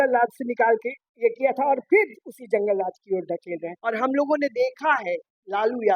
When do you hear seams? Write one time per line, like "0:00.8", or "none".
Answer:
0:03.7